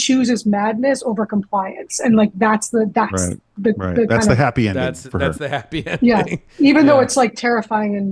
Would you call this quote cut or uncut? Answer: uncut